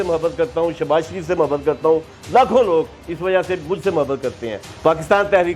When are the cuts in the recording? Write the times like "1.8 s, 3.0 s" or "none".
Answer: 4.7 s